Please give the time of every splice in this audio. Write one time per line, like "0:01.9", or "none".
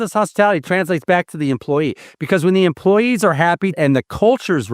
0:03.7